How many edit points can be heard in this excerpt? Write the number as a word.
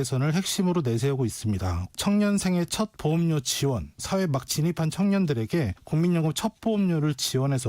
one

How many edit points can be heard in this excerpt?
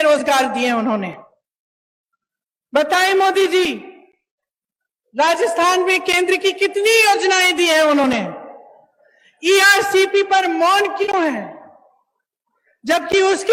zero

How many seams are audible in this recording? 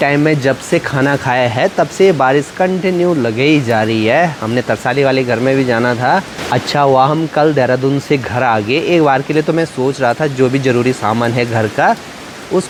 zero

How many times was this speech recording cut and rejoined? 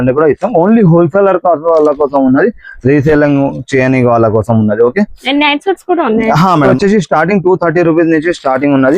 one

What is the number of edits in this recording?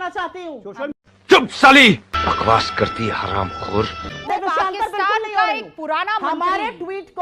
one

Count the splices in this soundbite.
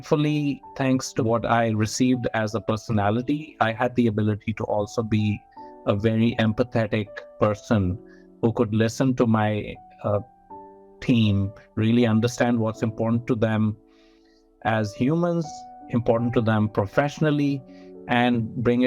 one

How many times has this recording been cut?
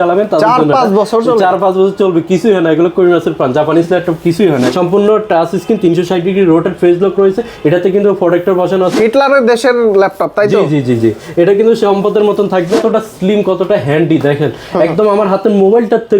three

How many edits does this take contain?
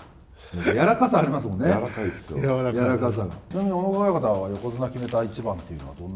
one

